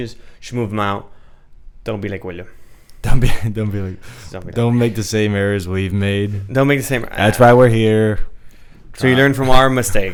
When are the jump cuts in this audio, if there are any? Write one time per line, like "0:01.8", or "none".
none